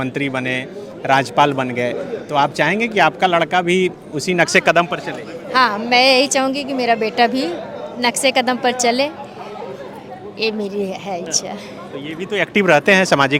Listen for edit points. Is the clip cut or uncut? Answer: uncut